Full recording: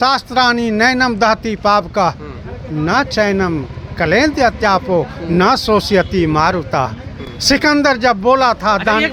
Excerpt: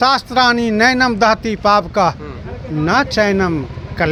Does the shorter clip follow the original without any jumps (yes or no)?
yes